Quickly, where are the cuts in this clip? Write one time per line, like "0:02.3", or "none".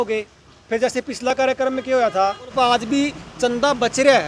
0:02.5